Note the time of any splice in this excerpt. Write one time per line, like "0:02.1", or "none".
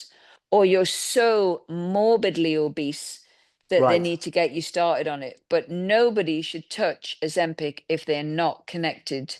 none